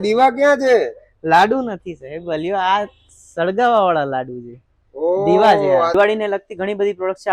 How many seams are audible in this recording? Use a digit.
1